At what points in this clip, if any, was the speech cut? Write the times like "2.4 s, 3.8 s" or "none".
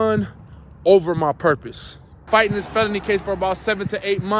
2.2 s

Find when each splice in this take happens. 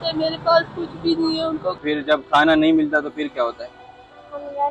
1.8 s

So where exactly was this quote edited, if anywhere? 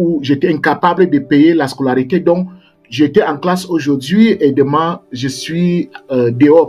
none

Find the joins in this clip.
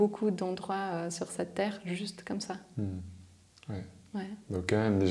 none

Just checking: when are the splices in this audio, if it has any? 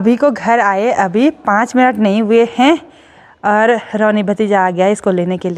none

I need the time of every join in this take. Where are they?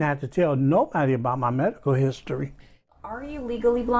2.8 s

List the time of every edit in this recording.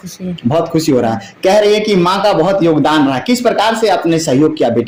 none

